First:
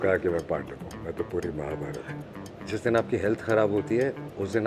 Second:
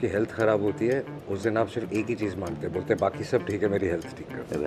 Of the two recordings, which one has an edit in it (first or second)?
first